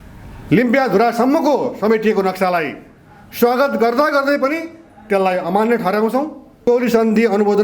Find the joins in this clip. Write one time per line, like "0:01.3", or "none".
0:06.7